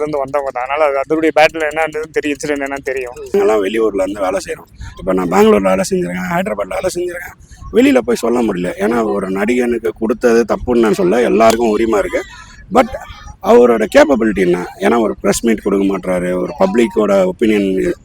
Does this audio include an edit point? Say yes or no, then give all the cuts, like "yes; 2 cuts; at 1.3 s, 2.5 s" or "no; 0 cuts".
yes; 1 cut; at 3.3 s